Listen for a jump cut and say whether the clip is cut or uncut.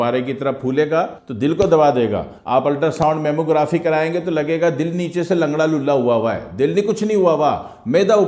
uncut